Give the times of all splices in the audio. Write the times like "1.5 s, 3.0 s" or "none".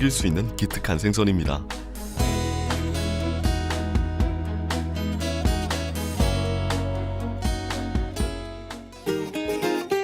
6.9 s